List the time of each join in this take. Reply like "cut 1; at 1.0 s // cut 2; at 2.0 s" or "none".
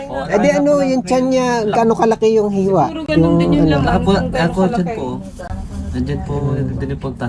none